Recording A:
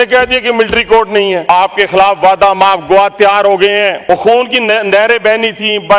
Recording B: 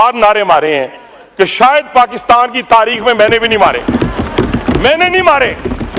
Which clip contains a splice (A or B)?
A